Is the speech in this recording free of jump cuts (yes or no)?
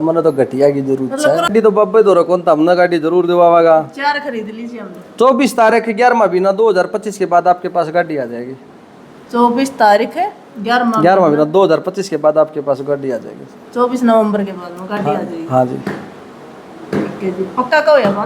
no